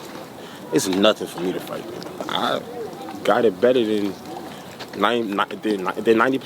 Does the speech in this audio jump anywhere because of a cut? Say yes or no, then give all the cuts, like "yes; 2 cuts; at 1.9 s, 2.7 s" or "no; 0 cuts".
yes; 1 cut; at 2.2 s